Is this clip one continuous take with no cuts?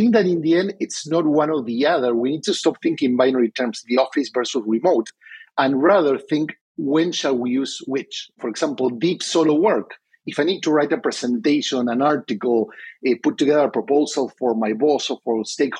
no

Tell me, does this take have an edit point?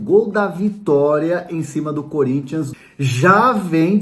yes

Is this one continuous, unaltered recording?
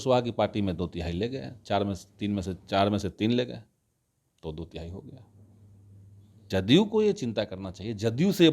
no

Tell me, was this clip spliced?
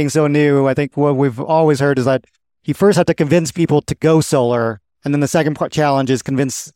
no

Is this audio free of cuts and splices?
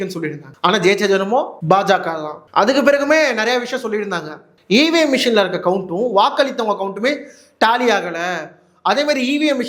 yes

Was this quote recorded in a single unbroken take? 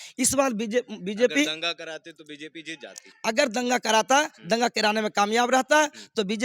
yes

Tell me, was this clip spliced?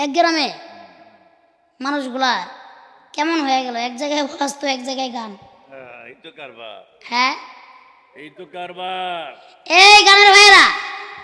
no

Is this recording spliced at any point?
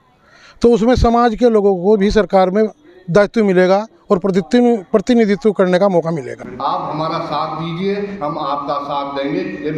yes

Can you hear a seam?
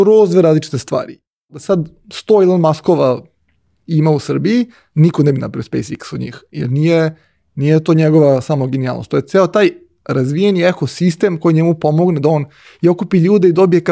yes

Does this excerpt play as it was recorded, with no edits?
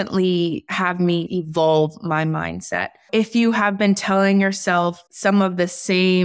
no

